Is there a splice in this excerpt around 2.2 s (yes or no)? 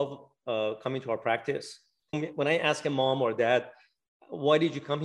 yes